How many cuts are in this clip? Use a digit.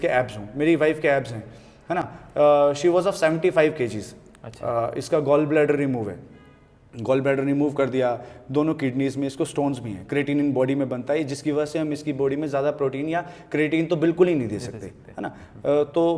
0